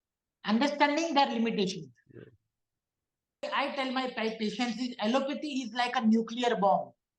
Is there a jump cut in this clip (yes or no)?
yes